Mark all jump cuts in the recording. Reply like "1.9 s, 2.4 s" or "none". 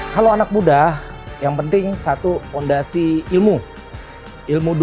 none